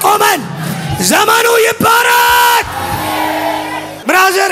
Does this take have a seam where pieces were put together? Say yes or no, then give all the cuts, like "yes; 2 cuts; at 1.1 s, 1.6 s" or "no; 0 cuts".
no; 0 cuts